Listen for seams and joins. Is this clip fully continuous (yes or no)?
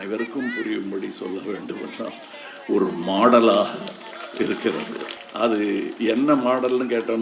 no